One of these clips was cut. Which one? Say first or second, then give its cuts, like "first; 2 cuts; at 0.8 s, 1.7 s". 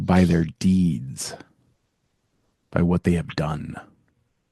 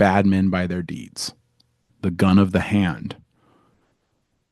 second; 1 cut; at 1.8 s